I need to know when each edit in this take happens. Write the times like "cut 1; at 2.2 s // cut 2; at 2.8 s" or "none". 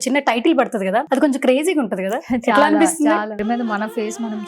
cut 1; at 1.1 s // cut 2; at 3.4 s